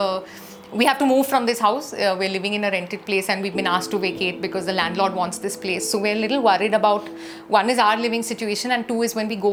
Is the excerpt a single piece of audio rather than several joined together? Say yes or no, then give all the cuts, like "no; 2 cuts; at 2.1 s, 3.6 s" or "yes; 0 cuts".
yes; 0 cuts